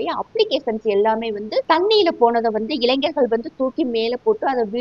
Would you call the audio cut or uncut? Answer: cut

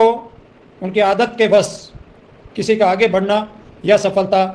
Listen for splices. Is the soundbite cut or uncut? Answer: uncut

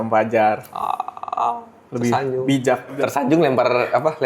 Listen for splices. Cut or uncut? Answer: cut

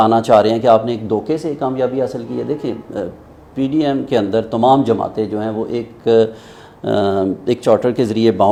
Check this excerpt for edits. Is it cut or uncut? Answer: uncut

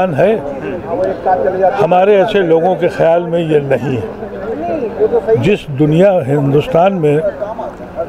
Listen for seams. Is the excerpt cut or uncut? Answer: uncut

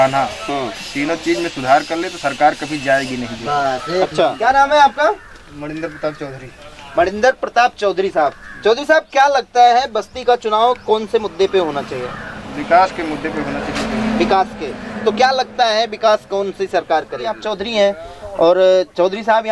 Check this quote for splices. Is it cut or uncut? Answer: cut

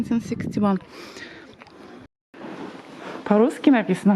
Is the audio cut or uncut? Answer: cut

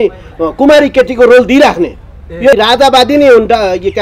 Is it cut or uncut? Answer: cut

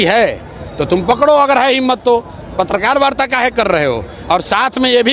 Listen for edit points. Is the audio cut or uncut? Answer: uncut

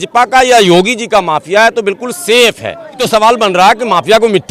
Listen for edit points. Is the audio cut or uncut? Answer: cut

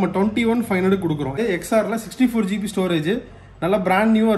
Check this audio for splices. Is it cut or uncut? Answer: cut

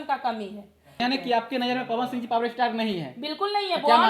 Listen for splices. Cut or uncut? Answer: cut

